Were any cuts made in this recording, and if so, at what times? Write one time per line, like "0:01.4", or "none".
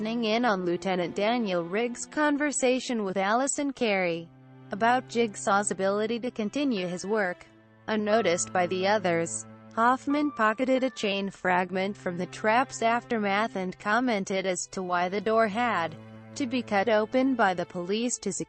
0:07.8